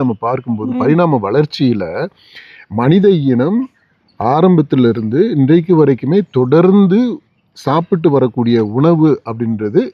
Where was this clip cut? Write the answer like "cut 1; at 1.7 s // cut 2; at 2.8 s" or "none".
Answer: none